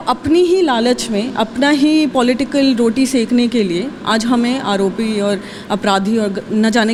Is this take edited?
no; 0 cuts

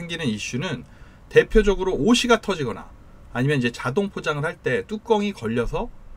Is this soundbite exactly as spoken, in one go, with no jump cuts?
yes; 0 cuts

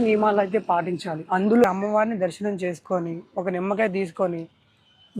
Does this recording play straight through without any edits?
no; 1 cut; at 1.6 s

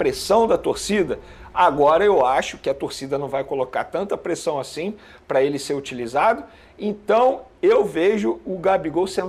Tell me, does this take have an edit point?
no; 0 cuts

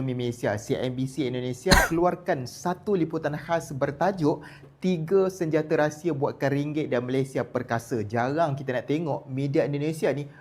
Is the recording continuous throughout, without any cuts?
yes; 0 cuts

